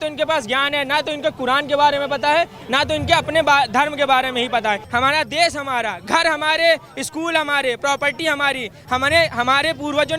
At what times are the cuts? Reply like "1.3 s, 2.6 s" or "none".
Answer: 4.9 s